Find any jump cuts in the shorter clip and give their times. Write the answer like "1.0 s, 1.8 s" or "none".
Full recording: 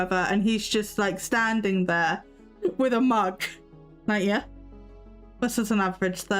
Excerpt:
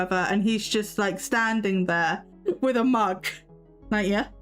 2.3 s